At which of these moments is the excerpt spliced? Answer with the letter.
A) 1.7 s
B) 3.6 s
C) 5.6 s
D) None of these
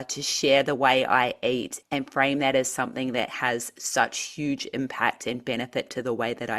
A